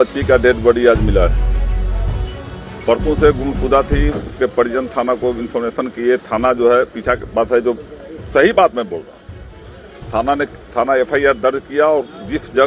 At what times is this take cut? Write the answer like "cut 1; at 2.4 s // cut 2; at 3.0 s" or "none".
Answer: none